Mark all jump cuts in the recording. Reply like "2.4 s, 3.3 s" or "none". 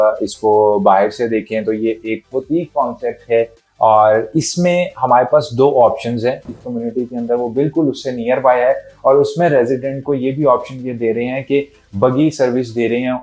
6.5 s